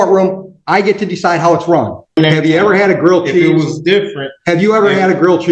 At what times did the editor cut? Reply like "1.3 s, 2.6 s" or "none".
2.2 s